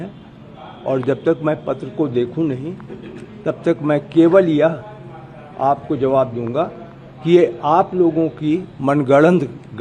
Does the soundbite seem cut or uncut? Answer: uncut